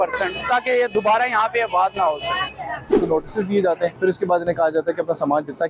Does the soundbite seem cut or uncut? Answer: cut